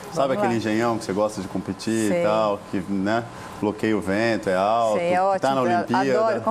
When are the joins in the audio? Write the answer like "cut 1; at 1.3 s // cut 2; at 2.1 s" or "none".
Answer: cut 1; at 4.8 s